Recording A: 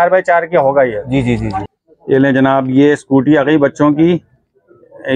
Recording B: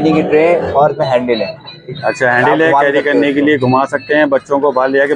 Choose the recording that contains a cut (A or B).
A